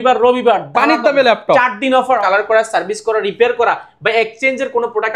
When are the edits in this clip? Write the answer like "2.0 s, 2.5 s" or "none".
2.2 s

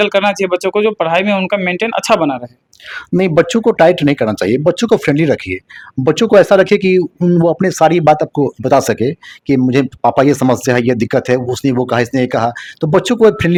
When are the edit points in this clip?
none

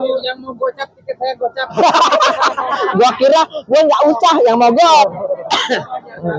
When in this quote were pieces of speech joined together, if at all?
5.0 s

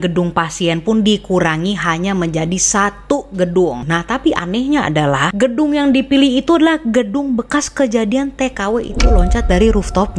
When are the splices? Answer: 3.8 s, 5.2 s

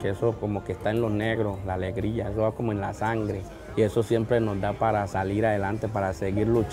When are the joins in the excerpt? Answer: none

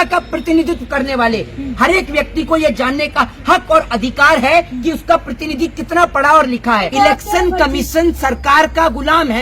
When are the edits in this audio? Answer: 6.9 s

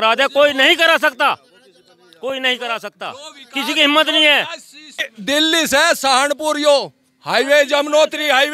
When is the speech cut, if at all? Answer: 5.1 s

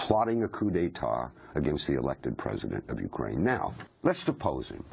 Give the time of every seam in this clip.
3.9 s

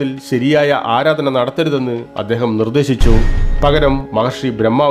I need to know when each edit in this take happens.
3.4 s

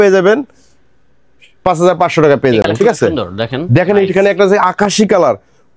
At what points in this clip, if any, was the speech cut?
none

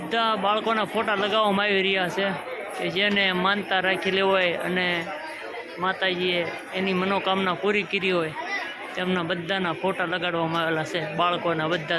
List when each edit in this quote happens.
none

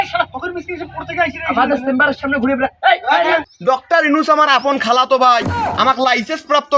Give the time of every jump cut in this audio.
3.5 s

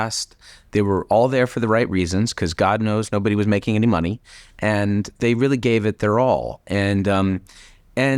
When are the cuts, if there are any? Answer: 5.1 s

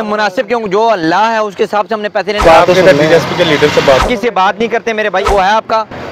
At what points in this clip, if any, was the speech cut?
2.4 s, 4.0 s, 5.3 s

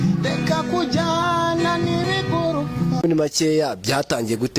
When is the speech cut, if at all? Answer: 3.0 s

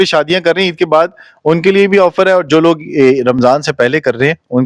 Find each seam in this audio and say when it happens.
none

